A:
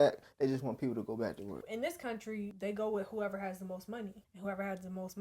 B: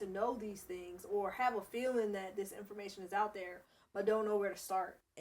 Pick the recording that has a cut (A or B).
A